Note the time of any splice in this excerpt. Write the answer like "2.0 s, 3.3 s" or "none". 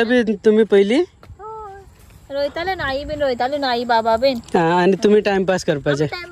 none